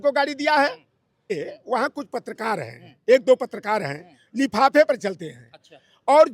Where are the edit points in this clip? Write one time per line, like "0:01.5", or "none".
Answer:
0:01.3

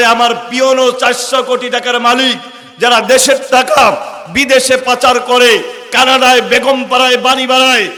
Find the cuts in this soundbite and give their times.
none

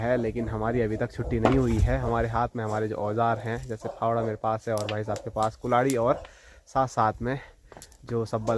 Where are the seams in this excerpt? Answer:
none

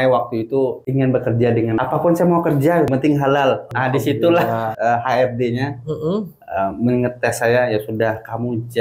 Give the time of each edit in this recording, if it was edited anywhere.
0:00.8
0:01.8
0:02.9
0:03.7
0:04.7

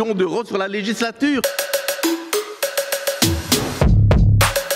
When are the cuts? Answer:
0:01.4

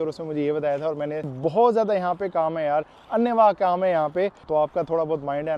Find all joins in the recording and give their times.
0:01.3
0:04.5

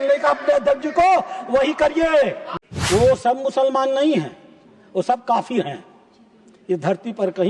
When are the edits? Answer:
0:02.4

